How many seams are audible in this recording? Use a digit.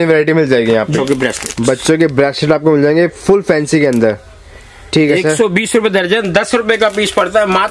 1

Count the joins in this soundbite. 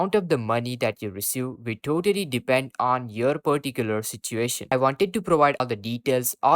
2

